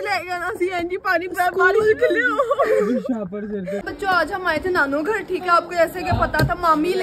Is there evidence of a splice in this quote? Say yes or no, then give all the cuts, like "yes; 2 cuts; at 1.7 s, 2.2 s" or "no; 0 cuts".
yes; 1 cut; at 3.9 s